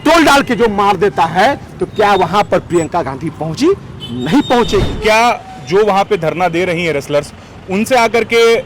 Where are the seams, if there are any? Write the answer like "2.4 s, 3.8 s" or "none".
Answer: 4.9 s